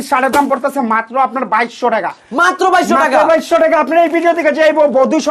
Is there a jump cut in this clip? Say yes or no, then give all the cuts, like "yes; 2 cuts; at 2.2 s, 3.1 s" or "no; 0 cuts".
no; 0 cuts